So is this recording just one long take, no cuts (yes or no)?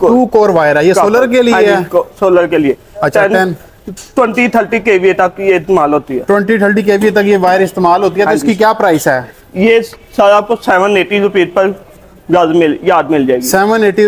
yes